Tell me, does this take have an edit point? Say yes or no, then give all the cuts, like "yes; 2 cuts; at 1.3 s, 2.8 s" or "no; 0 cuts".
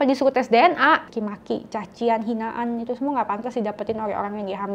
yes; 1 cut; at 1.1 s